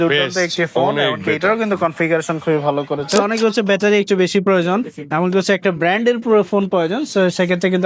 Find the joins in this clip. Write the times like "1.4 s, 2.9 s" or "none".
3.1 s